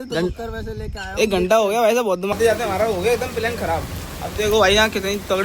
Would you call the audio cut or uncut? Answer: cut